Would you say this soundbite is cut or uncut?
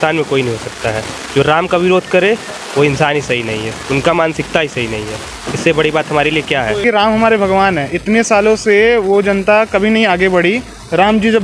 cut